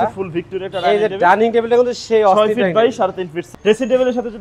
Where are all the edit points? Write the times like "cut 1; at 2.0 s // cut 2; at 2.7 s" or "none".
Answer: cut 1; at 3.3 s